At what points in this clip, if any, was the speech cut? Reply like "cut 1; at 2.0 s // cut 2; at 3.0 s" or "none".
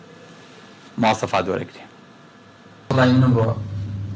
cut 1; at 2.9 s